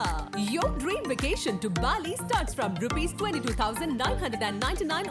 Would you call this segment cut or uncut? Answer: uncut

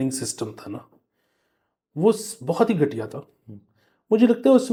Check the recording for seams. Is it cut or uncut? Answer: uncut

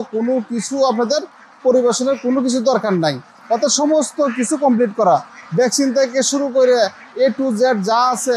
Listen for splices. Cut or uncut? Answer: uncut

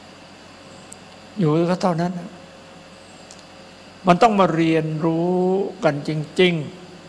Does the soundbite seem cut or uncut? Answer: uncut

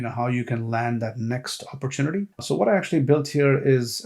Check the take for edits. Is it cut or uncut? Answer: cut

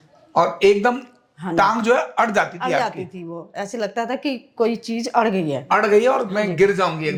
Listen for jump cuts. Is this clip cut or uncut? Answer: uncut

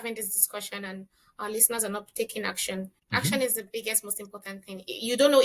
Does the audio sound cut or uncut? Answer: cut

